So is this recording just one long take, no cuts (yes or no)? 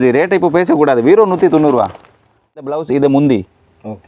no